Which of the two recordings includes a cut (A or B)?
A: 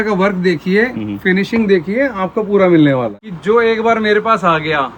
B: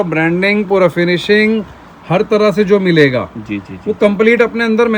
A